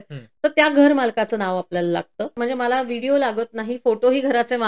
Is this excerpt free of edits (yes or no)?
no